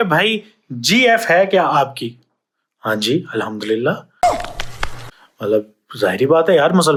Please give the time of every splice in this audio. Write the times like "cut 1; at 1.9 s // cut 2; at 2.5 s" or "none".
none

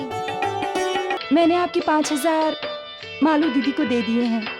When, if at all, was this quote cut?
cut 1; at 1.2 s

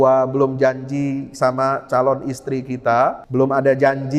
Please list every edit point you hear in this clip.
cut 1; at 3.2 s

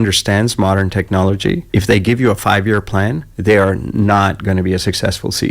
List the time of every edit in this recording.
cut 1; at 1.6 s // cut 2; at 3.3 s

